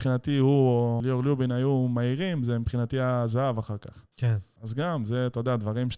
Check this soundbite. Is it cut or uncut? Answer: cut